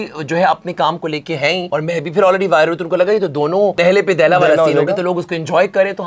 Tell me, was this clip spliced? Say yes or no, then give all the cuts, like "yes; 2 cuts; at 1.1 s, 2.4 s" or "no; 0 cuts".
yes; 2 cuts; at 1.7 s, 3.8 s